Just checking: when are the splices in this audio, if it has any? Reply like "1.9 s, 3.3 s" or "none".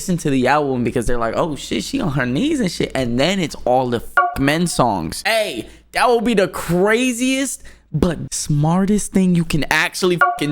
5.1 s, 8.3 s